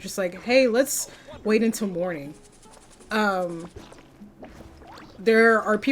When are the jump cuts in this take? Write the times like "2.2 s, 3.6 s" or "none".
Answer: none